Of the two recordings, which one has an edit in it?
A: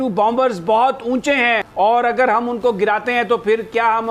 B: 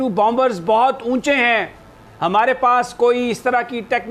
A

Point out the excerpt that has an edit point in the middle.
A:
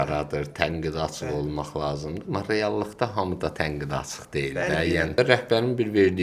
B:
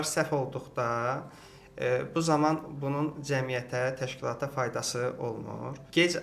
A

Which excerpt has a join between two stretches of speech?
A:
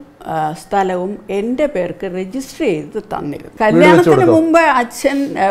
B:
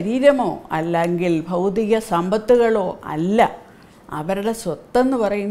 A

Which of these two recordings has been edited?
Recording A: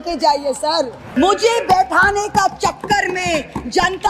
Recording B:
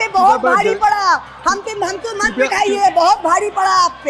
A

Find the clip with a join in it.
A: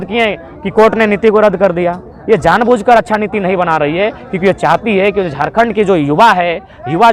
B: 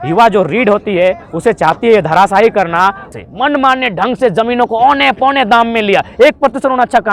B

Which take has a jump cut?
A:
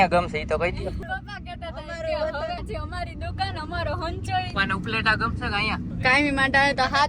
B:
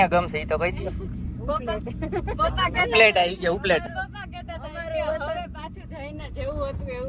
A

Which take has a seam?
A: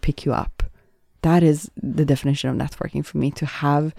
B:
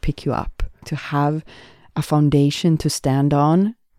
B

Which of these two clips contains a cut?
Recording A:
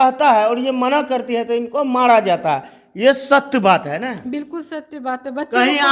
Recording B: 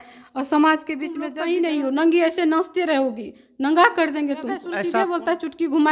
B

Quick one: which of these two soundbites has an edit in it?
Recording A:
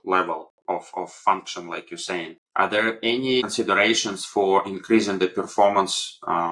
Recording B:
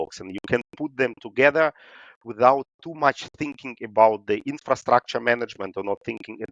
A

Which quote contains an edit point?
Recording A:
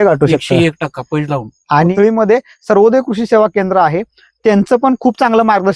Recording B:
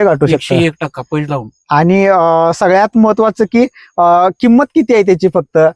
A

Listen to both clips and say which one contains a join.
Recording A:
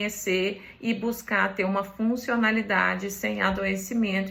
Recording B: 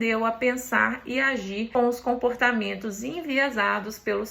B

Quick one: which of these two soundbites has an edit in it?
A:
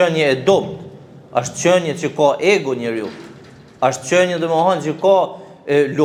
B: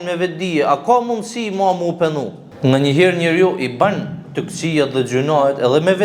B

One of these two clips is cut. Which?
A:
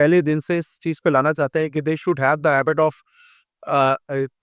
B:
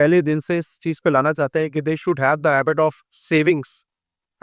B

